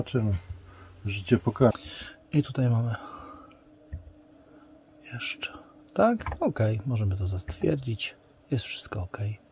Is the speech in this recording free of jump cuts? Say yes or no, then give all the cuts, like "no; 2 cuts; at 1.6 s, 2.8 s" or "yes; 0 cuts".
no; 1 cut; at 1.7 s